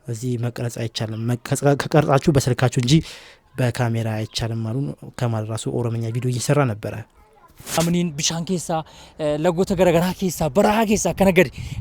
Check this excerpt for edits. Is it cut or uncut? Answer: uncut